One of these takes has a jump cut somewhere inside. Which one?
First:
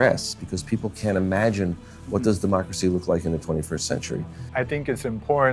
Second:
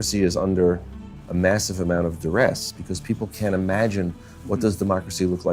first; 1 cut; at 4.5 s

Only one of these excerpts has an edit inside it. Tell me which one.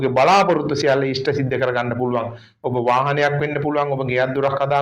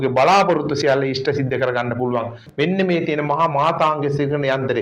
second; 1 cut; at 2.4 s

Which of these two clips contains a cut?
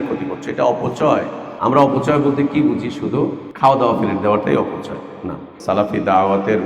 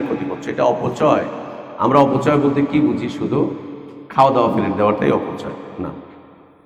first; 3 cuts; at 1.4 s, 3.4 s, 5.4 s

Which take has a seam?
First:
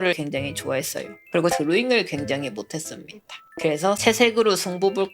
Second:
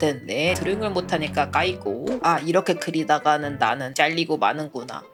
first; 1 cut; at 1.3 s

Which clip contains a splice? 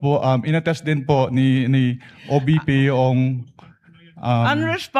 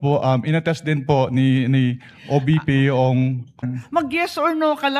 second; 1 cut; at 3.8 s

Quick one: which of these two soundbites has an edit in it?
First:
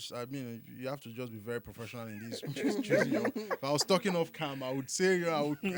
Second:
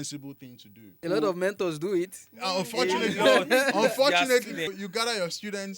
second; 2 cuts; at 0.9 s, 4.7 s

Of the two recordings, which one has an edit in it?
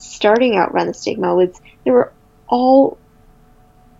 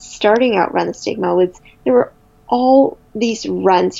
second; 1 cut; at 3.0 s

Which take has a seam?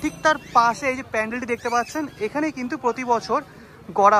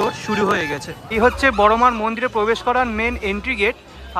second; 1 cut; at 1.0 s

